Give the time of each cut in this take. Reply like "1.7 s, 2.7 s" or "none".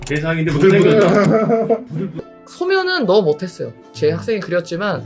2.2 s